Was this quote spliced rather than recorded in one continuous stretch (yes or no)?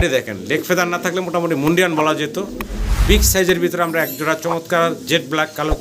no